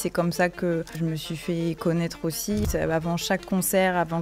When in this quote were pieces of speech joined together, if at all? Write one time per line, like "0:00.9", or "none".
0:00.9
0:02.7